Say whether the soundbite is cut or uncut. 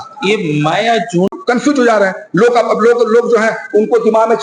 cut